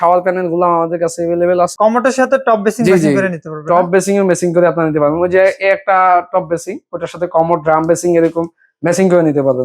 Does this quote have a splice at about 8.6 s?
no; 1 cut; at 1.7 s

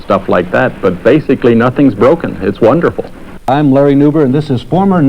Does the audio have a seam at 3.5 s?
yes; 1 cut; at 3.5 s

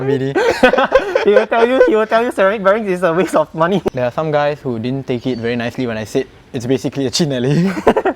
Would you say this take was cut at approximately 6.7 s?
no; 1 cut; at 3.9 s

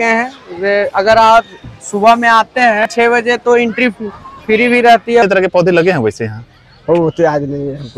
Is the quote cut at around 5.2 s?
yes; 2 cuts; at 2.9 s, 5.2 s

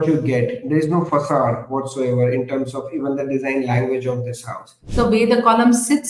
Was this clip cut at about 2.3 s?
no; 1 cut; at 4.8 s

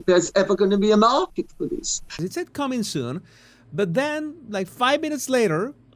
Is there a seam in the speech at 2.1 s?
yes; 1 cut; at 2.1 s

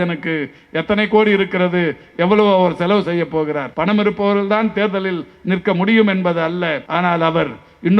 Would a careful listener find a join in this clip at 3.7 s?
yes; 2 cuts; at 3.7 s, 6.8 s

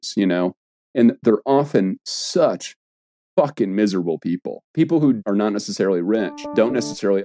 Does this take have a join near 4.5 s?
yes; 3 cuts; at 4.5 s, 5.2 s, 6.5 s

